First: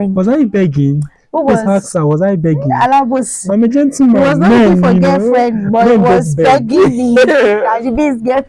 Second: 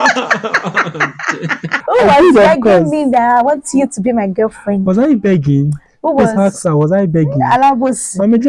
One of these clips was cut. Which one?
second; 1 cut; at 1.8 s

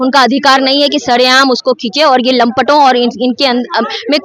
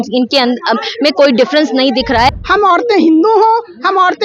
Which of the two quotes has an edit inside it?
second; 1 cut; at 2.3 s

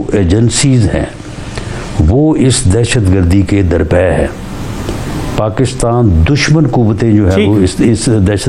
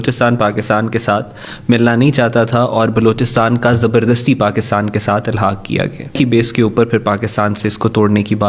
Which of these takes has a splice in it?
second; 1 cut; at 6.2 s

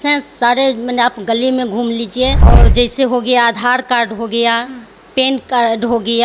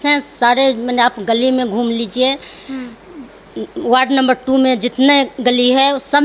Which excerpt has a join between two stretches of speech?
first; 1 cut; at 2.6 s

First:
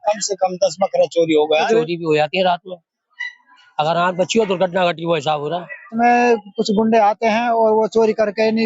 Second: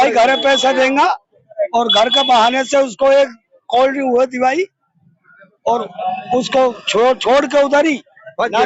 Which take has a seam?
first; 2 cuts; at 1.7 s, 5.9 s

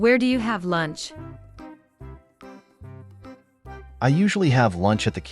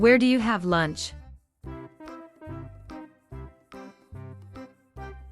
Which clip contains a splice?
first; 3 cuts; at 1.0 s, 2.6 s, 3.9 s

